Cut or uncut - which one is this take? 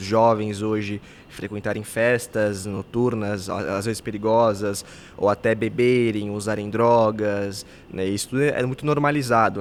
uncut